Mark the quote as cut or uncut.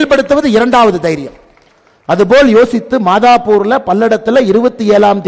uncut